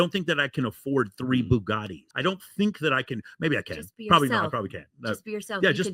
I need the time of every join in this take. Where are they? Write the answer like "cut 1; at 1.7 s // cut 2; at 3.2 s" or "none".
none